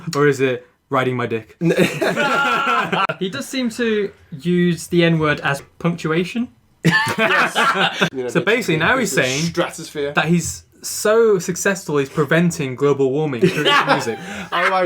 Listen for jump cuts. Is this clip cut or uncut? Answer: cut